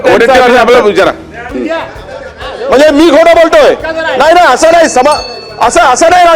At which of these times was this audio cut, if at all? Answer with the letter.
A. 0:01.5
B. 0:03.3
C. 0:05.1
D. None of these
A